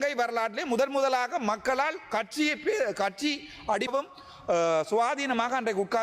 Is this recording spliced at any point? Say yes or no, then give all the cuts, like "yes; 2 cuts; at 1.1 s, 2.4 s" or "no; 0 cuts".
yes; 1 cut; at 3.9 s